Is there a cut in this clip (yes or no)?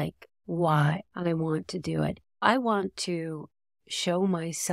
yes